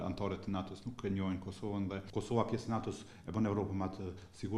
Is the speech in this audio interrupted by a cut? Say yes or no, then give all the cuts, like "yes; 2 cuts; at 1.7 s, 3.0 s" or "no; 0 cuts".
yes; 1 cut; at 2.0 s